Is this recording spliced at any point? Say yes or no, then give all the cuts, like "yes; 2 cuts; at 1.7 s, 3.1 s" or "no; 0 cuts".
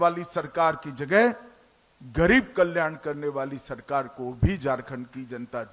no; 0 cuts